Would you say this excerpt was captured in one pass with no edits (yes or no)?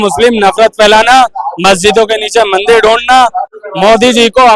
no